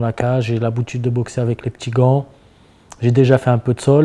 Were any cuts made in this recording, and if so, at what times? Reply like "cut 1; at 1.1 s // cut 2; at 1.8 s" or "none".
none